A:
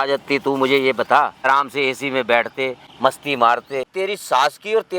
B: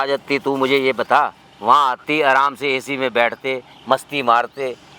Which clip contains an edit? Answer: A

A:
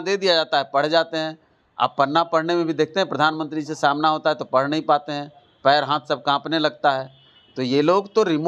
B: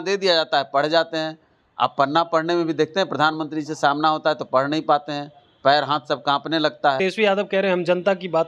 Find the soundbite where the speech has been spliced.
B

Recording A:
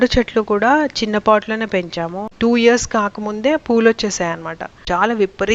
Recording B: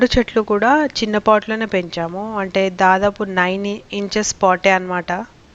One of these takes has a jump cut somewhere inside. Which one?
A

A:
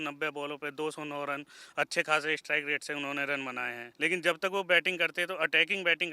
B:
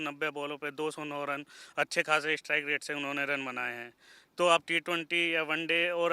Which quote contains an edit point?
A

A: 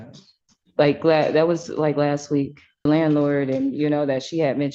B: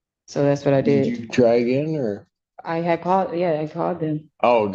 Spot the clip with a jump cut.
A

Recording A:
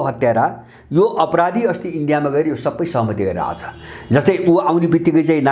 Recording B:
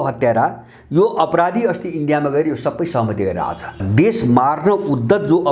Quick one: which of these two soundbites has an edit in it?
B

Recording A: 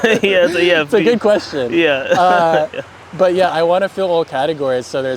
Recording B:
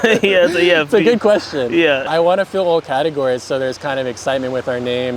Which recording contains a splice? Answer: B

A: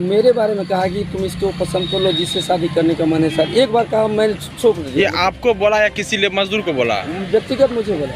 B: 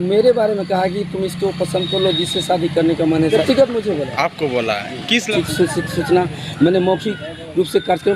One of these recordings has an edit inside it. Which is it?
B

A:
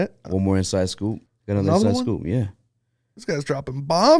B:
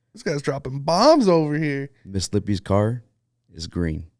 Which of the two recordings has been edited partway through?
A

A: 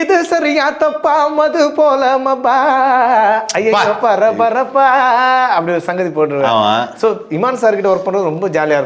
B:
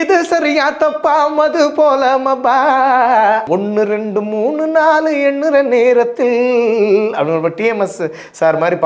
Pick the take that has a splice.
B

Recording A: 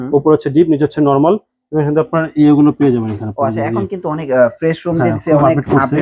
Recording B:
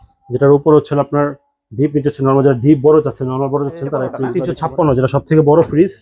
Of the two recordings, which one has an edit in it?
B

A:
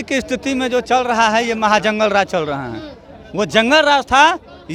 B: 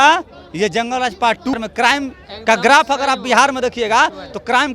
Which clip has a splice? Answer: B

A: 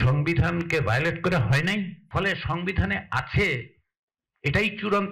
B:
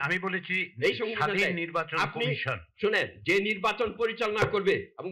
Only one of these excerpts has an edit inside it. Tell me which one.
A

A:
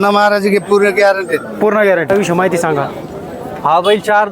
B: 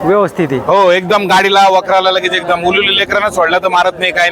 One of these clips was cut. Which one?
A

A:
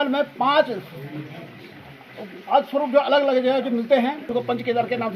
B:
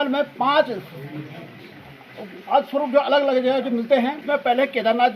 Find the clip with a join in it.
B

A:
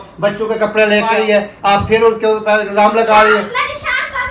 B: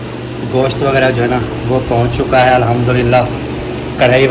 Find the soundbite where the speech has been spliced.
A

